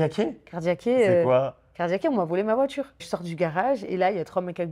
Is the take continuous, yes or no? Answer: no